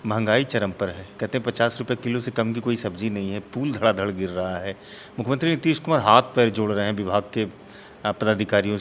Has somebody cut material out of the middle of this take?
no; 0 cuts

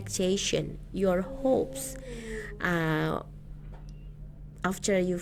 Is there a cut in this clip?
no; 0 cuts

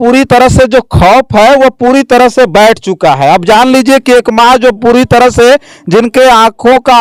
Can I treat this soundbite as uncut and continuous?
yes; 0 cuts

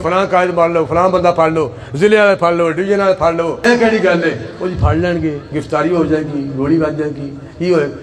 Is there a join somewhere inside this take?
yes; 1 cut; at 3.6 s

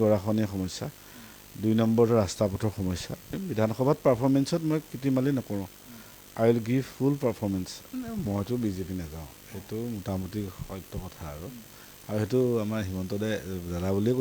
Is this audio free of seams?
no; 2 cuts; at 3.3 s, 7.8 s

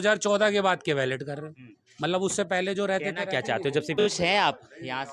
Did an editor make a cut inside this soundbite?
yes; 1 cut; at 4.1 s

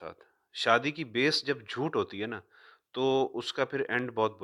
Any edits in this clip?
no; 0 cuts

